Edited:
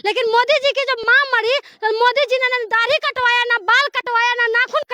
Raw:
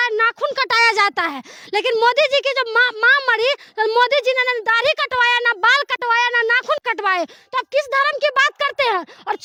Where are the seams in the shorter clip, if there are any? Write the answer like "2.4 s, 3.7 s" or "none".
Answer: 1.0 s